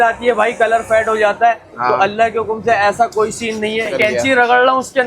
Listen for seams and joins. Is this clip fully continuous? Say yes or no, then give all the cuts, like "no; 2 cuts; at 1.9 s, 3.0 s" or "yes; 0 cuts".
no; 1 cut; at 3.9 s